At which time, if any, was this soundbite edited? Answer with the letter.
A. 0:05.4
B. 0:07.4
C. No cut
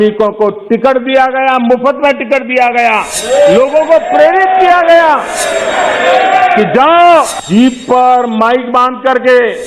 B